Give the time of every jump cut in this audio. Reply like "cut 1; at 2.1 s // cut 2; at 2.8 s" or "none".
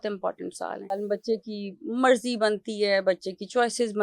cut 1; at 0.9 s